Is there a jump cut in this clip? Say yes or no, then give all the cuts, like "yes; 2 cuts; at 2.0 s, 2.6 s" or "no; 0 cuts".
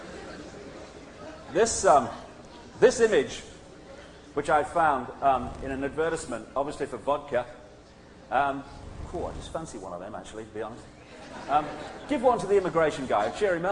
yes; 1 cut; at 11.6 s